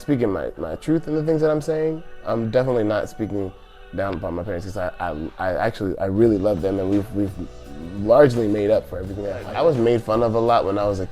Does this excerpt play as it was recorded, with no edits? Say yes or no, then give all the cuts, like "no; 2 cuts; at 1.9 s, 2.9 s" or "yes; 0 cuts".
no; 1 cut; at 9.4 s